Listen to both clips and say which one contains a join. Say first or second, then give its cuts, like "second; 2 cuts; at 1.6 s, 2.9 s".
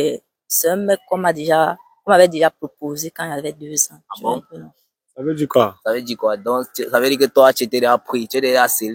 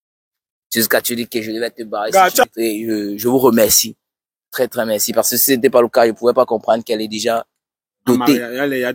second; 1 cut; at 2.4 s